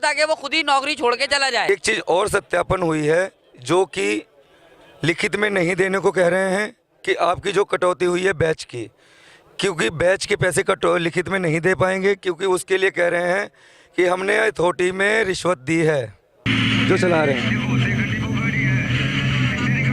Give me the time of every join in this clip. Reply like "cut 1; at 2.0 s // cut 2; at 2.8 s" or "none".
cut 1; at 1.7 s // cut 2; at 16.3 s